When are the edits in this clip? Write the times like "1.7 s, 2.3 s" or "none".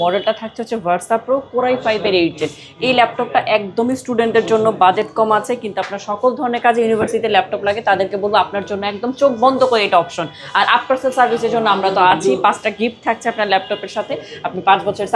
none